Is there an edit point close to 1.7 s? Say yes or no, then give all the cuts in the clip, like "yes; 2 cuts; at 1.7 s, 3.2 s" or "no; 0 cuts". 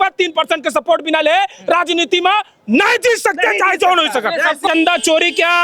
no; 1 cut; at 4.6 s